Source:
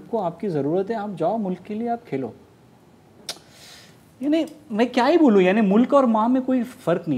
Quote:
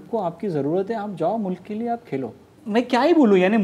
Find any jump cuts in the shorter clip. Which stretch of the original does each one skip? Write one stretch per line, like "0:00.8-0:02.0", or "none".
0:02.6-0:04.6